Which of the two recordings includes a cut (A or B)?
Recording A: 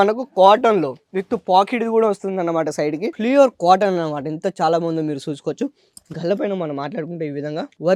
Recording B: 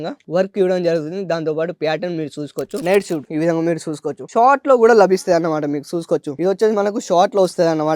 B